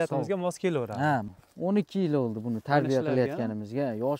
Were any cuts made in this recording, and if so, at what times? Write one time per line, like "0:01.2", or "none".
0:01.4